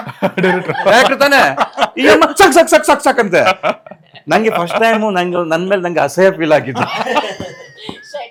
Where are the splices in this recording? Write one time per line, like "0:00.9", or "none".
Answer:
none